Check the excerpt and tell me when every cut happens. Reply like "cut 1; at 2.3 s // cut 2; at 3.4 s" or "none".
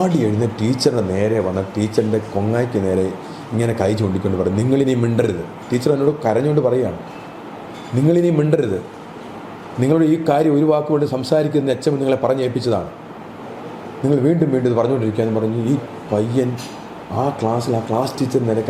none

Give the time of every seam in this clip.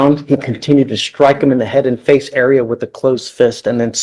none

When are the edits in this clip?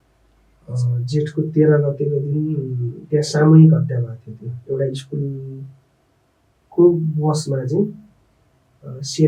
none

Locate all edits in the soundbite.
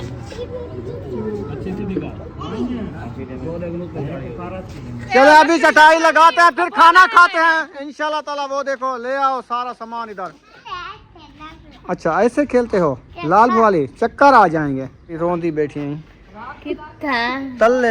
cut 1; at 5.1 s // cut 2; at 10.6 s // cut 3; at 15.2 s

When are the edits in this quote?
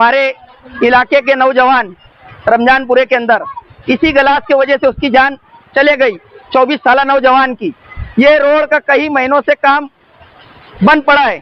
none

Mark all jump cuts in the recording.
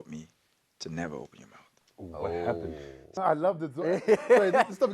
cut 1; at 3.2 s

